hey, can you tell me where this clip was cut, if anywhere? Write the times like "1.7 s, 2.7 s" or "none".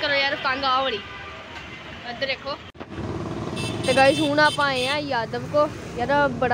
2.7 s